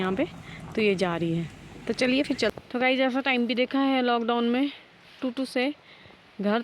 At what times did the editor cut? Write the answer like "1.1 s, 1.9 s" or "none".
2.5 s